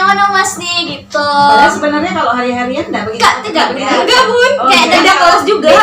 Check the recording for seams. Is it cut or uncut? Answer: uncut